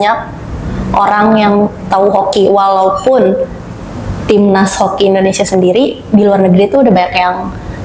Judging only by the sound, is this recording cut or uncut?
uncut